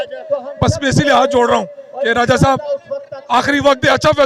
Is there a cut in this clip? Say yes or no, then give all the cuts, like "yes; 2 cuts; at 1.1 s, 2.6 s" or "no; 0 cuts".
no; 0 cuts